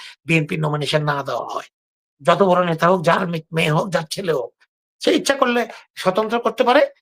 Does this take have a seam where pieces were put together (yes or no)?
no